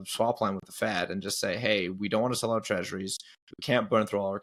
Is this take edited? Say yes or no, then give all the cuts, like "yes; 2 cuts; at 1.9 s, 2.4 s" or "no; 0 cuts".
no; 0 cuts